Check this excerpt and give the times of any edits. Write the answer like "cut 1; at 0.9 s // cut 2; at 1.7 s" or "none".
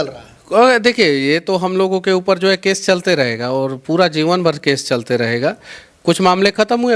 none